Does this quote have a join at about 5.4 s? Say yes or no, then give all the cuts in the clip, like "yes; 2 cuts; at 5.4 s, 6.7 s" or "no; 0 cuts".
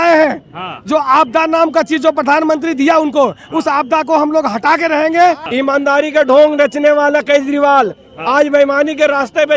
yes; 1 cut; at 5.4 s